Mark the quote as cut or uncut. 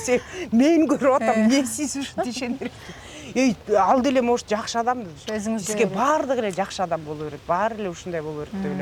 uncut